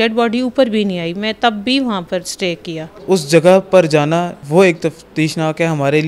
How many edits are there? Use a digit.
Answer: 2